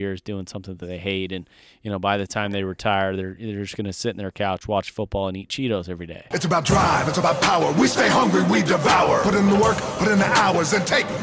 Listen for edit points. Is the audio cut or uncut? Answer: cut